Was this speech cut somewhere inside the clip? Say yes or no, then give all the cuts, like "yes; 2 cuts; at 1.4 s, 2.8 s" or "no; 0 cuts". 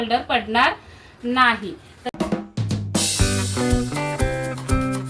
yes; 1 cut; at 2.0 s